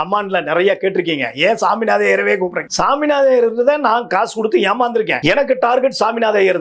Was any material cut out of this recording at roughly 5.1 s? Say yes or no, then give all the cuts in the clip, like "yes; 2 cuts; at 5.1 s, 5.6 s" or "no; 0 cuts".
yes; 2 cuts; at 2.6 s, 5.1 s